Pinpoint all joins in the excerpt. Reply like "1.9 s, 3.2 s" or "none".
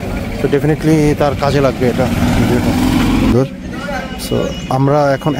3.3 s